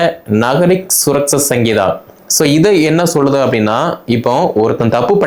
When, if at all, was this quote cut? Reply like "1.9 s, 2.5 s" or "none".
none